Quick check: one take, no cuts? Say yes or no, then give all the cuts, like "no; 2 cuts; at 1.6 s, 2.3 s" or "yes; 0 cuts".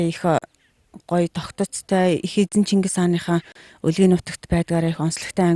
yes; 0 cuts